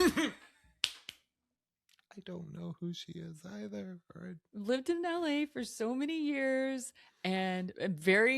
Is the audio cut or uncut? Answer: cut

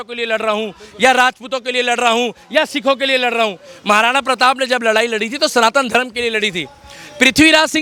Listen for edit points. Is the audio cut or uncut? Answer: uncut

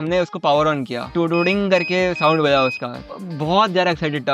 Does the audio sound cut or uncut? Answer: cut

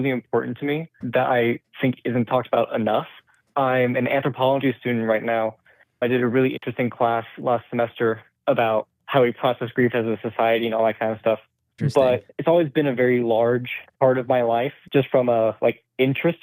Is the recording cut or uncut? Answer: cut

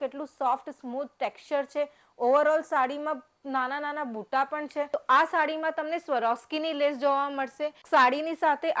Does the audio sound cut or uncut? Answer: cut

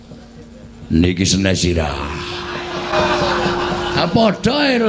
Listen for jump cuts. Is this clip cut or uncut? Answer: uncut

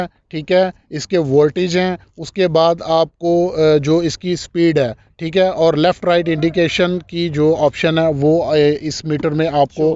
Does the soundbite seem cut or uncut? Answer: uncut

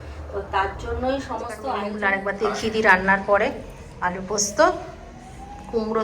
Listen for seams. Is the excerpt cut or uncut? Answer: cut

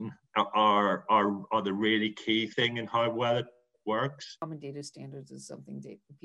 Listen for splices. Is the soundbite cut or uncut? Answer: cut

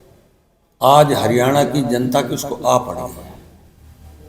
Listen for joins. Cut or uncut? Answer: uncut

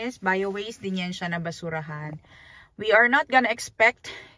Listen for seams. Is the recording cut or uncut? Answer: uncut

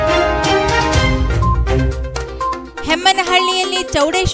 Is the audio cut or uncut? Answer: cut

